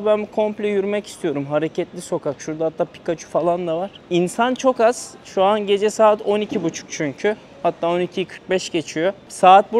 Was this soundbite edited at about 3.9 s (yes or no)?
no